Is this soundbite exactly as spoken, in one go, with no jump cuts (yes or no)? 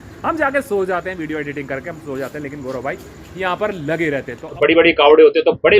no